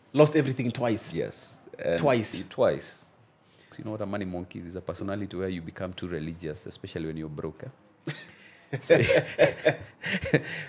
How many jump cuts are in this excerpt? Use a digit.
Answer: 1